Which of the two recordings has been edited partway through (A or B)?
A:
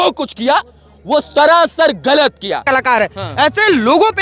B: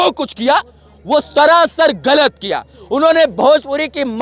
A